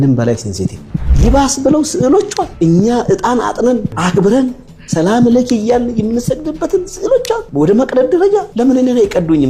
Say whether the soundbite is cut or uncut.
uncut